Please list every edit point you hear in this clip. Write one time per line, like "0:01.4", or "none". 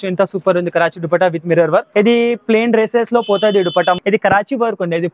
0:01.9
0:04.0